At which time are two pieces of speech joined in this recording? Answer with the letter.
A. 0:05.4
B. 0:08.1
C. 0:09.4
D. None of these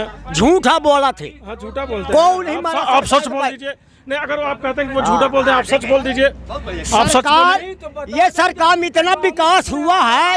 D